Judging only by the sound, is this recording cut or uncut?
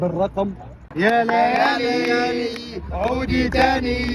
cut